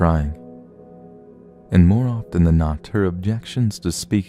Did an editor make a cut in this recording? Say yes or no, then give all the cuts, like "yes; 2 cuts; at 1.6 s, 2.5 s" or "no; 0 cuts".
no; 0 cuts